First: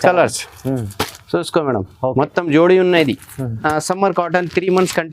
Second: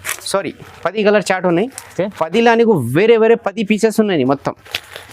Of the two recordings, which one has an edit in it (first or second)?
first